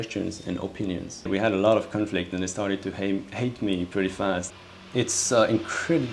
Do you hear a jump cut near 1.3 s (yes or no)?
yes